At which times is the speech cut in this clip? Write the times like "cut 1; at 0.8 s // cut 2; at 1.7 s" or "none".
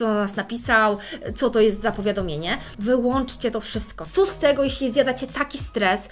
cut 1; at 2.7 s // cut 2; at 4.0 s